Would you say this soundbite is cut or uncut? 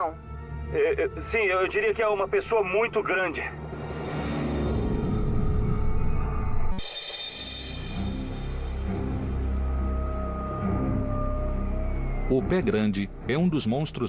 cut